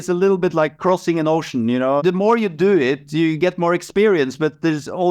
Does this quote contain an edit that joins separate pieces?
yes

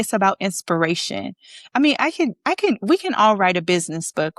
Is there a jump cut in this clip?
no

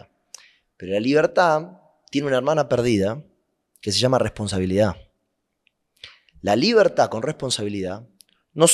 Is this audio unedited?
yes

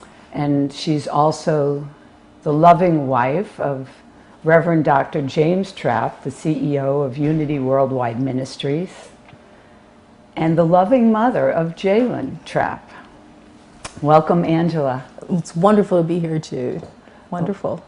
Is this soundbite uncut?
no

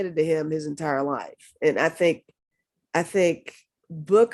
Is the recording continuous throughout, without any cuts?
yes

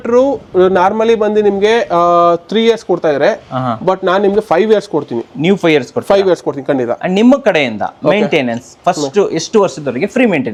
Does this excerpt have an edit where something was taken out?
no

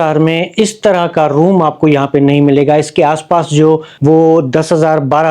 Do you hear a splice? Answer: yes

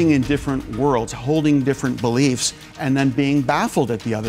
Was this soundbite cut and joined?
no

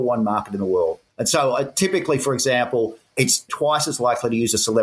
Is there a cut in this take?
yes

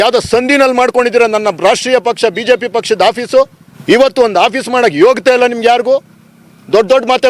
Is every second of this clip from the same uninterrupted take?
no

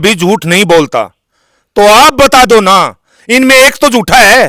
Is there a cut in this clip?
no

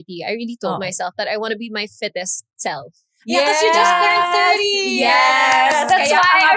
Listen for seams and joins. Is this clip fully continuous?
yes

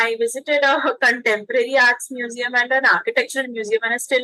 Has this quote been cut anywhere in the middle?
no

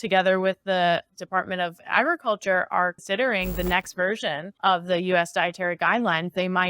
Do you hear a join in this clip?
yes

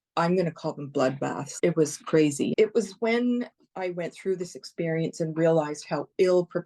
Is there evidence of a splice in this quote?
yes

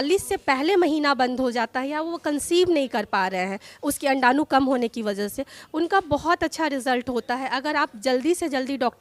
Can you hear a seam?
no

